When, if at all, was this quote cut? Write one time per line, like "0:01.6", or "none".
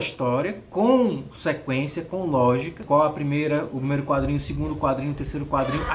0:02.8

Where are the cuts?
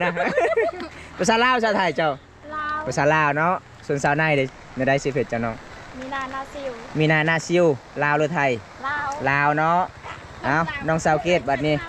none

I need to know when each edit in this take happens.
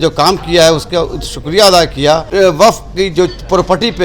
0:02.3

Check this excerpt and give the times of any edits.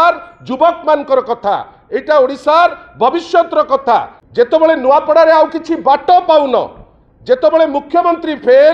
0:04.2

